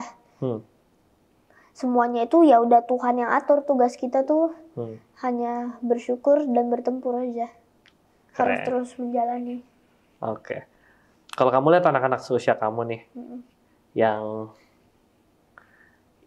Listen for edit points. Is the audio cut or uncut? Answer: uncut